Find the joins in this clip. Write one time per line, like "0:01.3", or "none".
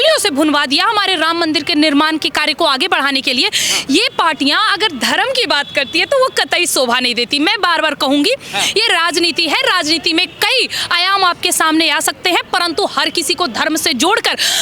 none